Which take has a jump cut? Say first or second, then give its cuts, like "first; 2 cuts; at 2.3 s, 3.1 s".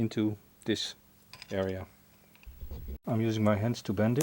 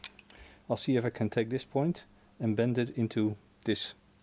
first; 1 cut; at 3.0 s